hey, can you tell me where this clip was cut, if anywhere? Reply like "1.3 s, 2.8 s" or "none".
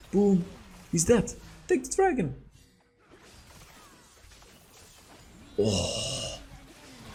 none